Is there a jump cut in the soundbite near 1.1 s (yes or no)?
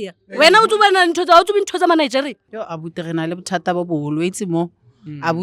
no